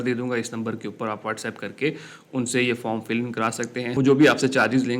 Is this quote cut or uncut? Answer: cut